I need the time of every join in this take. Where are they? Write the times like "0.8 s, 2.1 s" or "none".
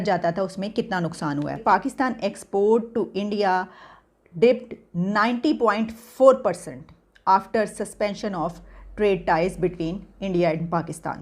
1.6 s